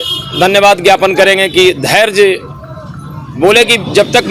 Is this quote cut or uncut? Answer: uncut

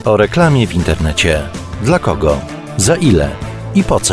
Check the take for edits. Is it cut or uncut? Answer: uncut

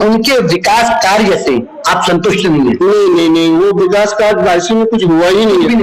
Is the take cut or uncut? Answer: uncut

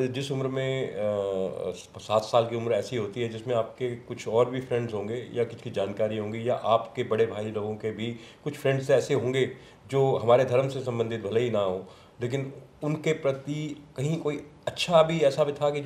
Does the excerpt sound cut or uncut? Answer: uncut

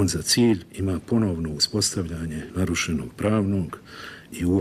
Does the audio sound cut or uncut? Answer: cut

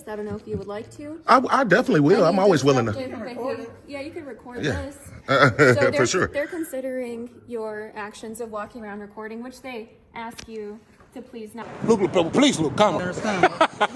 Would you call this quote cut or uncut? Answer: cut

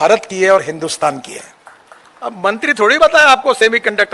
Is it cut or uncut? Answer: cut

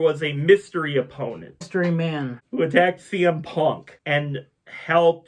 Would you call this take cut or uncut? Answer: cut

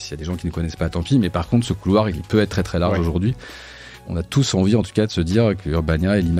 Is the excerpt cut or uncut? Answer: cut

